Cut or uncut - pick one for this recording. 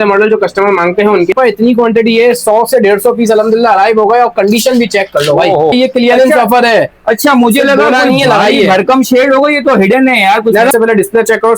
cut